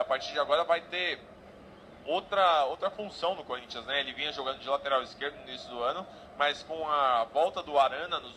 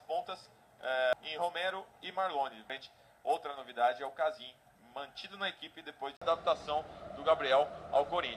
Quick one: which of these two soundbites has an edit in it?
second; 3 cuts; at 1.1 s, 2.7 s, 6.2 s

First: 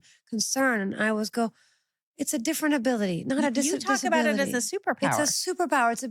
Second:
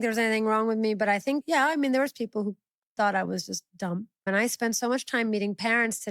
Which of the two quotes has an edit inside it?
second; 2 cuts; at 1.4 s, 4.2 s

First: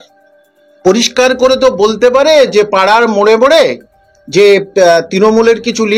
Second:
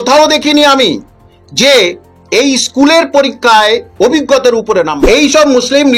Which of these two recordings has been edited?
second; 1 cut; at 4.9 s

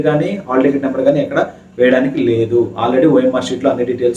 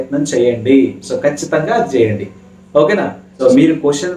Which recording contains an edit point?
second; 1 cut; at 3.3 s

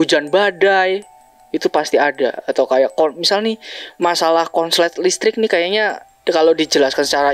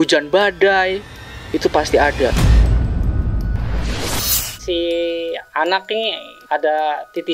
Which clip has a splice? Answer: second; 3 cuts; at 2.4 s, 4.4 s, 6.3 s

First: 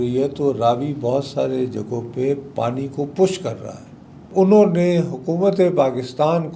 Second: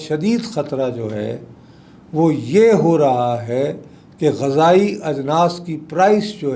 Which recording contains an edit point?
first; 1 cut; at 4.3 s

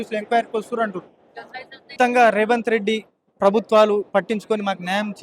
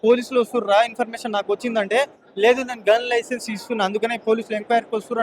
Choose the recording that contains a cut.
first; 1 cut; at 1.9 s

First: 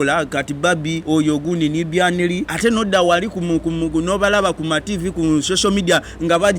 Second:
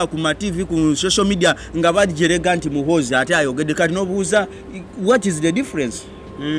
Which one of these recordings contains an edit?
first; 2 cuts; at 1.0 s, 2.5 s

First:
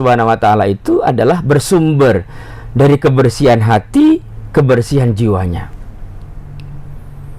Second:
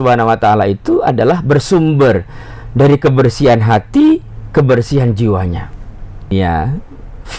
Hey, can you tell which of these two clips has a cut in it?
second; 1 cut; at 6.3 s

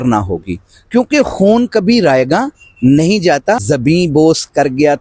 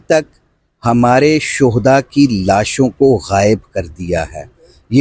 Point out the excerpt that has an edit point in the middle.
first; 1 cut; at 3.6 s

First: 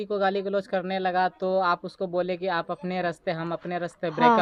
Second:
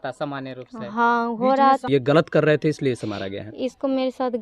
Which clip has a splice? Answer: second; 1 cut; at 1.8 s

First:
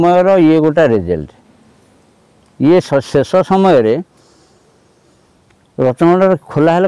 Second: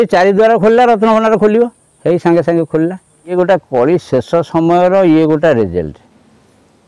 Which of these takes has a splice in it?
second; 1 cut; at 3.3 s

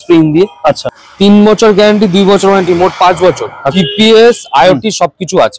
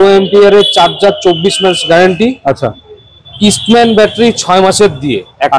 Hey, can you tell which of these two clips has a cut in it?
first; 2 cuts; at 0.9 s, 3.7 s

